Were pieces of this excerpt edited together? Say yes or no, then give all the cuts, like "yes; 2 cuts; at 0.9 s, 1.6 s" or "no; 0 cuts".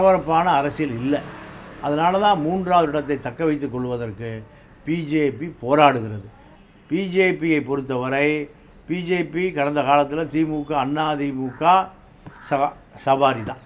yes; 1 cut; at 6.5 s